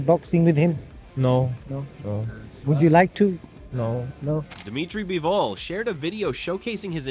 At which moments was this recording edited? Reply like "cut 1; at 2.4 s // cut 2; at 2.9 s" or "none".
none